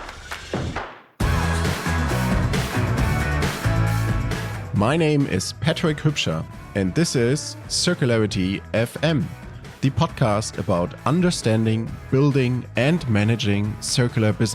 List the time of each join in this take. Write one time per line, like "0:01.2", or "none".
none